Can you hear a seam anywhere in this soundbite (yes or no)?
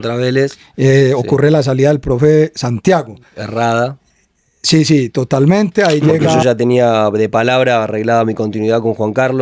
yes